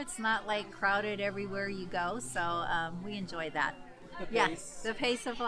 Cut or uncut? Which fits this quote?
uncut